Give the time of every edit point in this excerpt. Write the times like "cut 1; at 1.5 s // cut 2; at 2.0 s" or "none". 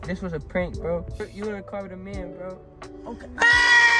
cut 1; at 1.3 s